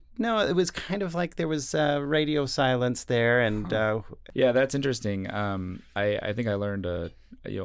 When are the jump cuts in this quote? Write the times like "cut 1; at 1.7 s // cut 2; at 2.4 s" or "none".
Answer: cut 1; at 4.2 s